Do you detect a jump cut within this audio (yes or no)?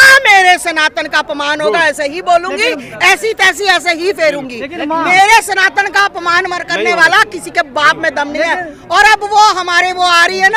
no